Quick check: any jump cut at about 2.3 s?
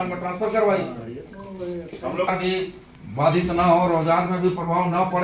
yes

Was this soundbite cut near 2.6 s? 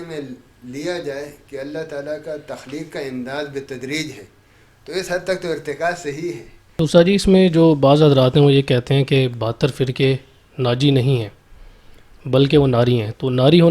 no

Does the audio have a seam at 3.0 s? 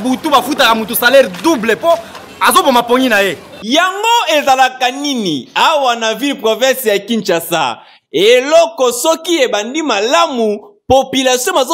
no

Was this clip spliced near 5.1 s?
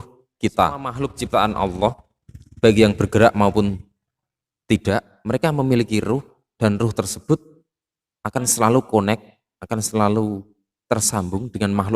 yes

